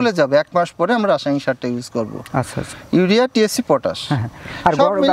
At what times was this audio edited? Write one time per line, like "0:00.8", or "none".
none